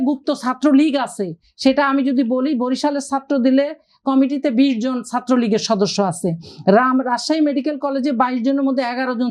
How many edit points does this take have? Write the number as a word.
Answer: zero